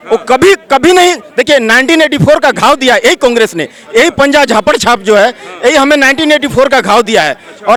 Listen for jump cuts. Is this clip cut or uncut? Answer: uncut